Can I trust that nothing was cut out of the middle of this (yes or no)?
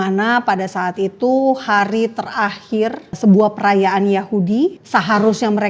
no